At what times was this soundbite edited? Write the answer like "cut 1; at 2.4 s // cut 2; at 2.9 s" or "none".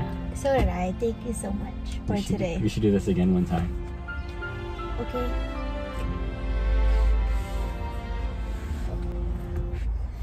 none